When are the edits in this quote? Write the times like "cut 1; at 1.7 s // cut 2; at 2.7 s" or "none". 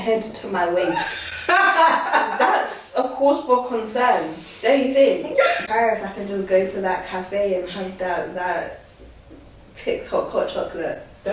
cut 1; at 5.7 s